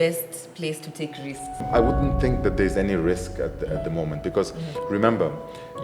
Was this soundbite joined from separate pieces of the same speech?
yes; 1 cut; at 1.6 s

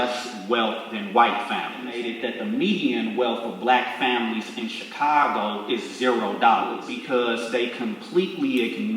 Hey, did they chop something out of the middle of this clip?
yes; 2 cuts; at 2.1 s, 6.9 s

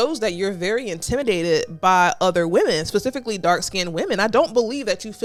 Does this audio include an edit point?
no; 0 cuts

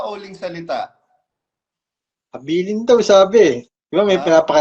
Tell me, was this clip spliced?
no; 0 cuts

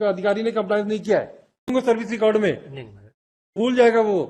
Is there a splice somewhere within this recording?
yes; 2 cuts; at 1.7 s, 3.6 s

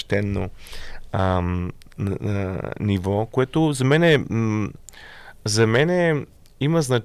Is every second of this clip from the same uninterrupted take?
yes; 0 cuts

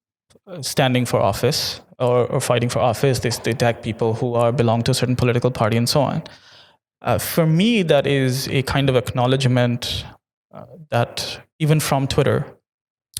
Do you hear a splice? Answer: no; 0 cuts

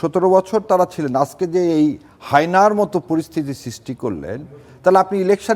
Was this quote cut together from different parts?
no; 0 cuts

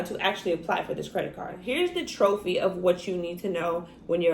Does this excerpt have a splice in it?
yes; 1 cut; at 1.6 s

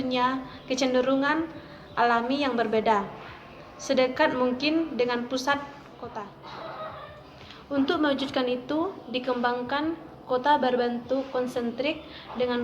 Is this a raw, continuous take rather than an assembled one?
no; 1 cut; at 6.2 s

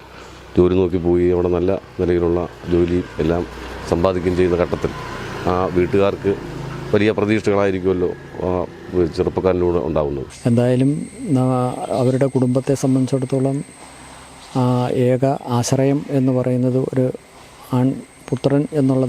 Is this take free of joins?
no; 1 cut; at 10.3 s

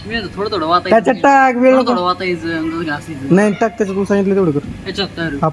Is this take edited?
no; 0 cuts

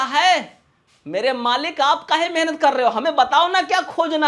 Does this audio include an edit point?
no; 0 cuts

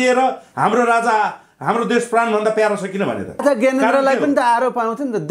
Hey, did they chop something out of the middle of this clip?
yes; 1 cut; at 3.4 s

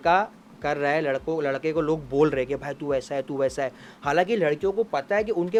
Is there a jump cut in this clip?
no; 0 cuts

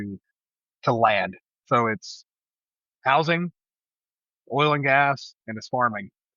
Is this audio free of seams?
yes; 0 cuts

